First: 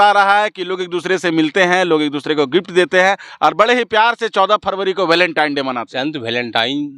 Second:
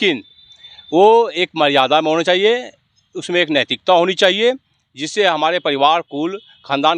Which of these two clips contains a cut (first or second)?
first